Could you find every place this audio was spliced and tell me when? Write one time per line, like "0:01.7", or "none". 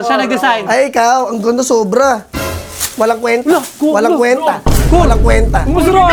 none